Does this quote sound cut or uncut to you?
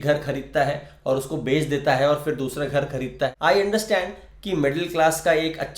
cut